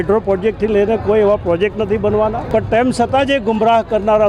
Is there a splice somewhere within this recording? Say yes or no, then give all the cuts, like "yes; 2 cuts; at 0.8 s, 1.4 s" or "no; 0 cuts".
yes; 1 cut; at 2.4 s